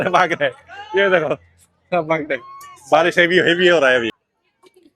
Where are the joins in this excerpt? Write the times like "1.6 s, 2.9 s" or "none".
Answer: 4.1 s